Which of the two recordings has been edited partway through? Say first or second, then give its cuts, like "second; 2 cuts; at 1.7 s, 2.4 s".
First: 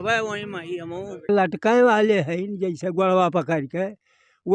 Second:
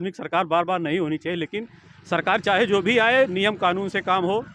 first; 1 cut; at 1.2 s